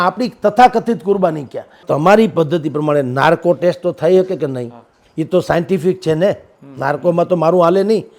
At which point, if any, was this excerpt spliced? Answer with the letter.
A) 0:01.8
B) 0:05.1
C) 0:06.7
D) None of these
A